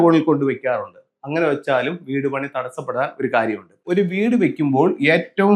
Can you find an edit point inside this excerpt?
yes; 1 cut; at 3.8 s

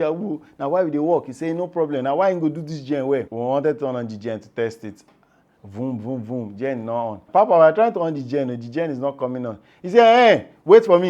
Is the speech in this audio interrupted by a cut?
yes; 2 cuts; at 3.3 s, 7.2 s

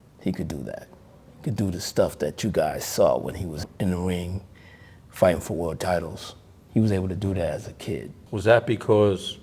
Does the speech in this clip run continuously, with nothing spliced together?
no; 2 cuts; at 3.6 s, 8.2 s

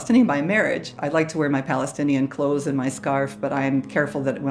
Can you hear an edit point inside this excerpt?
yes; 1 cut; at 0.9 s

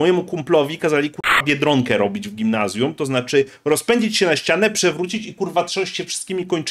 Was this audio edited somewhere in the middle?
no; 0 cuts

